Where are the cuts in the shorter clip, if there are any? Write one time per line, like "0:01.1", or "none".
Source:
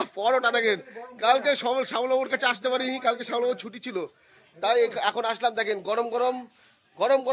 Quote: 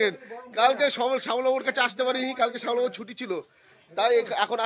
none